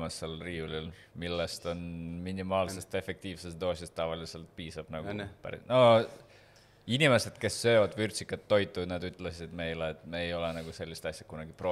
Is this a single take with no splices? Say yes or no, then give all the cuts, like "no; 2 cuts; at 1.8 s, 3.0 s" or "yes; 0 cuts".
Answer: yes; 0 cuts